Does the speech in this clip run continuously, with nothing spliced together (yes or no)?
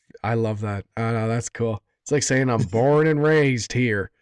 yes